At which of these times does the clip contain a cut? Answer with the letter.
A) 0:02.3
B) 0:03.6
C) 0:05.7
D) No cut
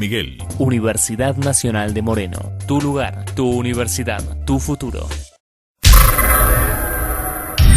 C